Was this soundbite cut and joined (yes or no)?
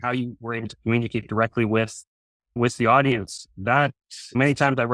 no